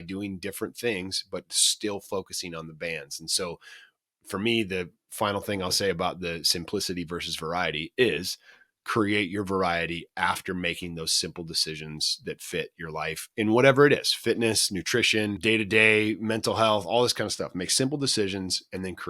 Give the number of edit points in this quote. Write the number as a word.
one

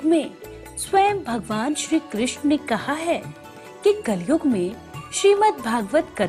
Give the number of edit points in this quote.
zero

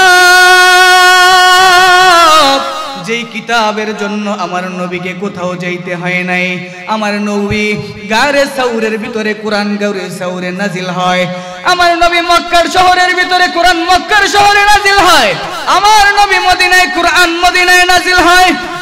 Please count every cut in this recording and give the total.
zero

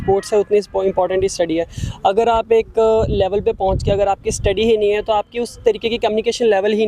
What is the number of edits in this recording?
zero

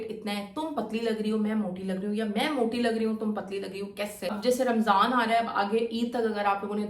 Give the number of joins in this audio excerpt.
one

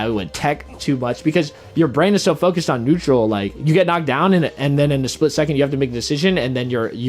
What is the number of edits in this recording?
one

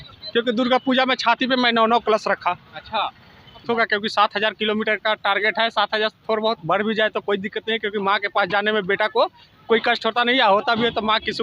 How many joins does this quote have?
one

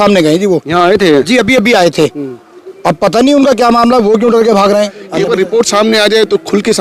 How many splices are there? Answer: one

